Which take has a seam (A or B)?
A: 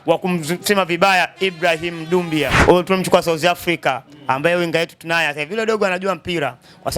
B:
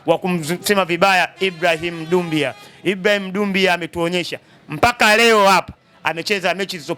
A